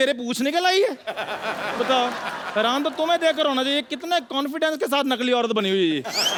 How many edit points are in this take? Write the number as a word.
zero